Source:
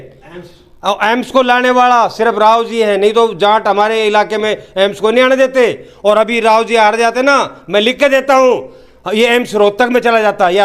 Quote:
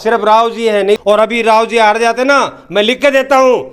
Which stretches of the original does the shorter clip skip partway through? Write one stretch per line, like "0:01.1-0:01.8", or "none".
0:03.1-0:06.0